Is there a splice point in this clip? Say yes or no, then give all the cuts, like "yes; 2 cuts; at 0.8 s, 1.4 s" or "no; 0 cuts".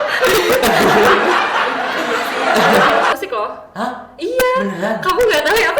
yes; 1 cut; at 3.1 s